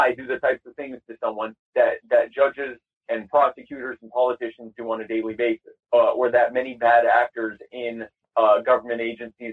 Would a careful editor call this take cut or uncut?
cut